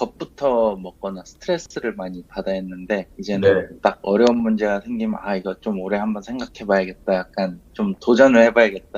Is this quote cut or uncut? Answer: uncut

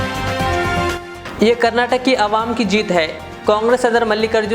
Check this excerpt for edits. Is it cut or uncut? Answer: uncut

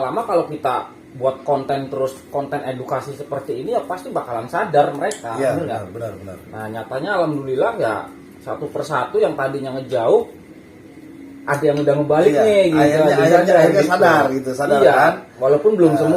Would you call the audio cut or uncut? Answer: uncut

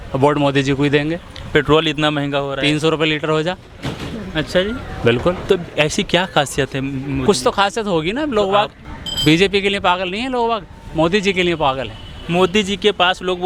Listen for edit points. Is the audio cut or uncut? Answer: uncut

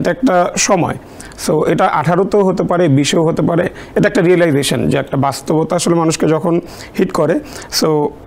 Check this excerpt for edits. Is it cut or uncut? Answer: uncut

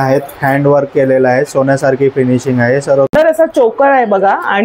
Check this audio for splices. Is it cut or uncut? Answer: cut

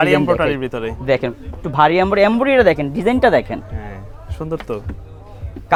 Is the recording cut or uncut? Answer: uncut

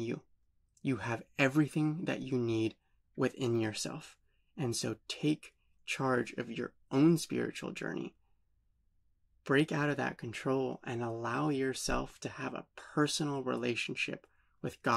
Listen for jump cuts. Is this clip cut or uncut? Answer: uncut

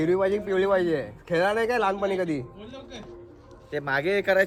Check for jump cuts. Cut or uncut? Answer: uncut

